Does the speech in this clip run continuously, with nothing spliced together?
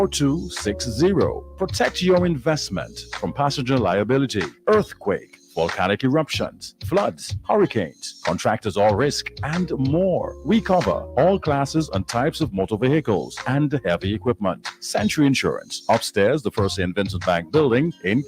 no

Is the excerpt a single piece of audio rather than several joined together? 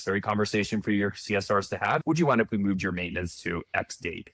no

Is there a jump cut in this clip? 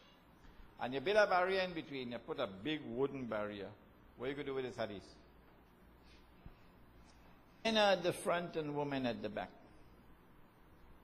no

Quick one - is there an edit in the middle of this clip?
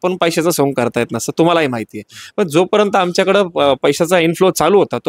no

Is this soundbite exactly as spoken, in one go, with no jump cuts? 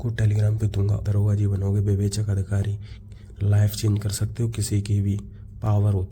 no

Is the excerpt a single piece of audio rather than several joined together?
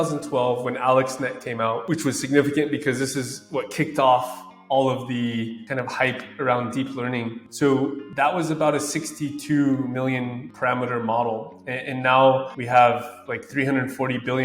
yes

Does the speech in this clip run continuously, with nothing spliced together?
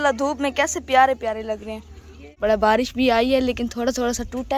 no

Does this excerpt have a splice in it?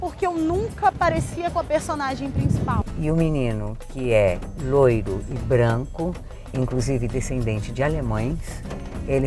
yes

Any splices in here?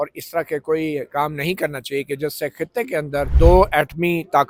no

